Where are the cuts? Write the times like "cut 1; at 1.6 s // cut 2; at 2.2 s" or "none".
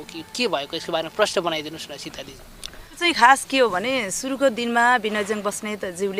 cut 1; at 3.0 s